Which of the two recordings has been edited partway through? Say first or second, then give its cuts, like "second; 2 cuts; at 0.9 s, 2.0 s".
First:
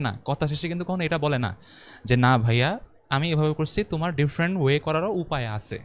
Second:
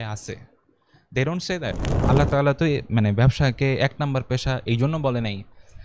second; 1 cut; at 1.9 s